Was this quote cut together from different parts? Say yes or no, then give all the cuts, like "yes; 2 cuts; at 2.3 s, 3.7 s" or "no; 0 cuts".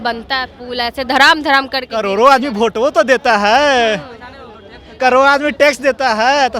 no; 0 cuts